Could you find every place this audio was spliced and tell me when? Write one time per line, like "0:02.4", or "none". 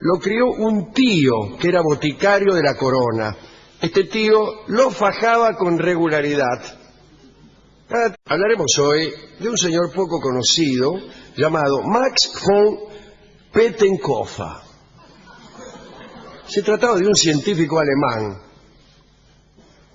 none